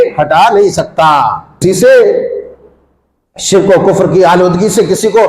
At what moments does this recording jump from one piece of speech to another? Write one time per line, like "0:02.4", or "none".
0:01.6